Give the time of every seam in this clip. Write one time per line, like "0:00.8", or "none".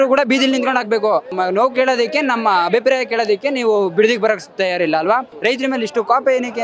0:01.3
0:05.3